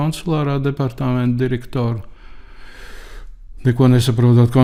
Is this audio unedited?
yes; 0 cuts

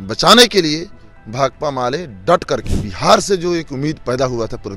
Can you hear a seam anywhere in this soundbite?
yes; 1 cut; at 2.6 s

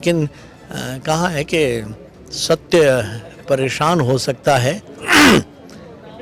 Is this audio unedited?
yes; 0 cuts

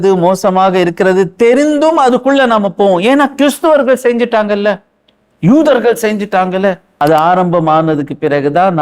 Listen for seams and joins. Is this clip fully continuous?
no; 1 cut; at 6.9 s

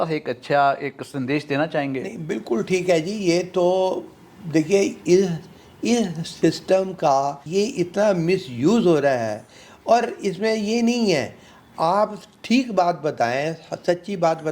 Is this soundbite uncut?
no; 1 cut; at 7.4 s

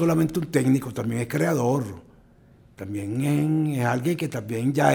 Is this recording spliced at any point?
no; 0 cuts

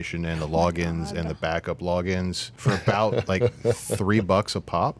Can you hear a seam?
yes; 1 cut; at 2.5 s

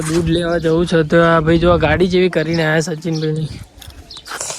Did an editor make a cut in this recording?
no; 0 cuts

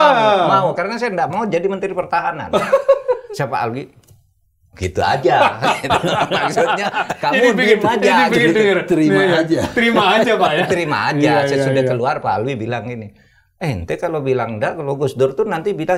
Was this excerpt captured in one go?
yes; 0 cuts

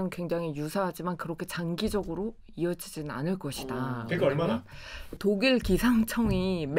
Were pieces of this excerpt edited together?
yes; 1 cut; at 5.2 s

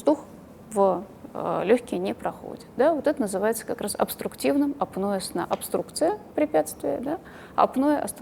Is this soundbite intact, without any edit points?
yes; 0 cuts

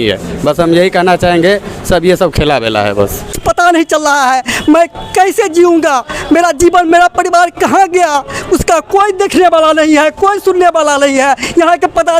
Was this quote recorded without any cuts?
no; 1 cut; at 3.3 s

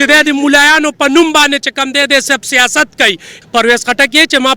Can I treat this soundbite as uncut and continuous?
no; 1 cut; at 3.3 s

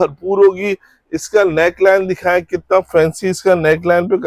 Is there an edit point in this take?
no; 0 cuts

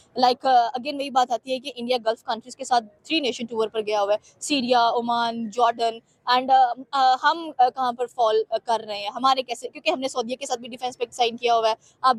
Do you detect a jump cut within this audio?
no; 0 cuts

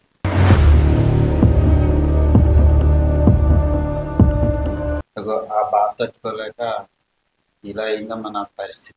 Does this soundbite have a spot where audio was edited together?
no; 0 cuts

